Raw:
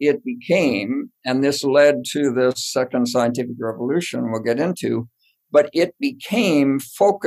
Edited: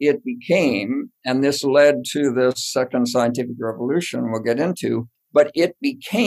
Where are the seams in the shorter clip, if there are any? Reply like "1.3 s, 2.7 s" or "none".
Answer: 5.2 s

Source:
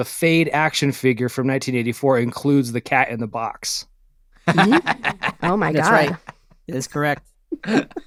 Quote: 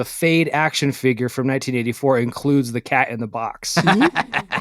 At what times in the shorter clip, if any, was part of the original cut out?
3.6 s

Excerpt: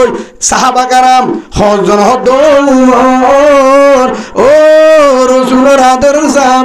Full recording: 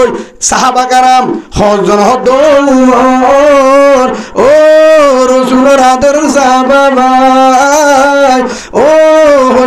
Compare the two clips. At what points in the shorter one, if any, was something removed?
none

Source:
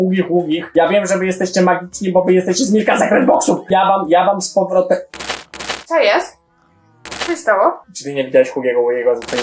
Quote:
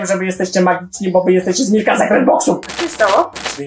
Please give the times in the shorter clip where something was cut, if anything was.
2.6 s

